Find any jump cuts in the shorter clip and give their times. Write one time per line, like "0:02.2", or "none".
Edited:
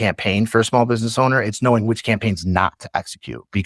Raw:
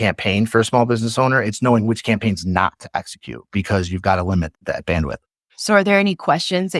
none